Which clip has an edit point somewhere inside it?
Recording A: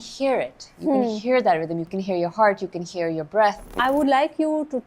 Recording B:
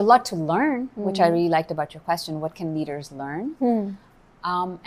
A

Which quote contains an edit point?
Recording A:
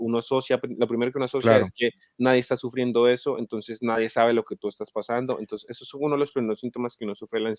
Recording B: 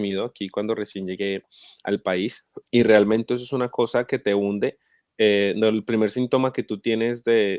B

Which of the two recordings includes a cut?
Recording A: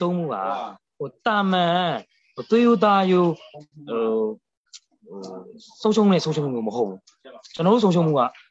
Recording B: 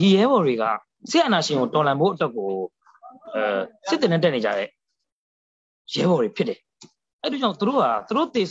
B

